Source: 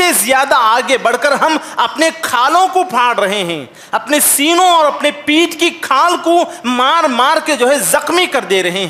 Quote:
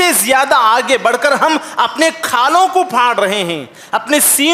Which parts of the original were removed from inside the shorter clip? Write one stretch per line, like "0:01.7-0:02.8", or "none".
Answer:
none